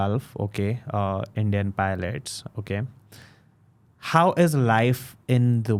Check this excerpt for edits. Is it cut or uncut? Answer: uncut